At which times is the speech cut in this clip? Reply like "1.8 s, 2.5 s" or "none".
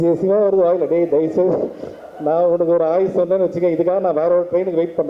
none